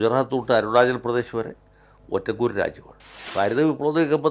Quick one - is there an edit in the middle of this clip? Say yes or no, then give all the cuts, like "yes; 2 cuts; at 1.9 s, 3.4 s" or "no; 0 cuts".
yes; 1 cut; at 3.2 s